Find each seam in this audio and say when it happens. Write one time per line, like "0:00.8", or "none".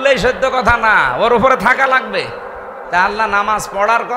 0:02.8